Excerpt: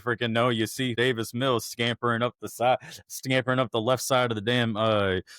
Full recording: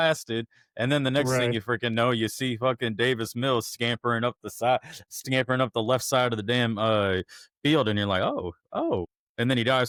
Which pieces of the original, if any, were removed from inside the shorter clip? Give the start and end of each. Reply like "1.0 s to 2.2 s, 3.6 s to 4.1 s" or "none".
2.6 s to 3.0 s